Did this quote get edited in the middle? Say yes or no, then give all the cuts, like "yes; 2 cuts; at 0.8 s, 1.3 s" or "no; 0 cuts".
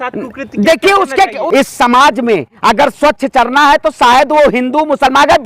no; 0 cuts